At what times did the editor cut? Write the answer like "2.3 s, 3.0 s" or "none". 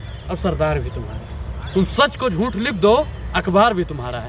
none